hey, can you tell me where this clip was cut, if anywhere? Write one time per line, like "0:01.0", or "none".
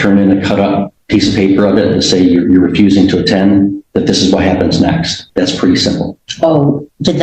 0:00.9
0:05.2